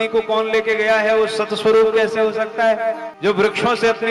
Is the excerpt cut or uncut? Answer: cut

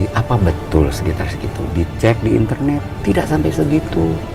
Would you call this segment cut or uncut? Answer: uncut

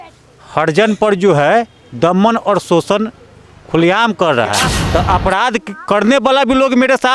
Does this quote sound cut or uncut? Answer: cut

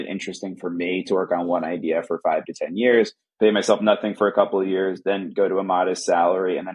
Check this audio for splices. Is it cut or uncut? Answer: uncut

